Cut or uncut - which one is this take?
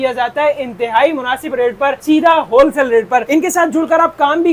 uncut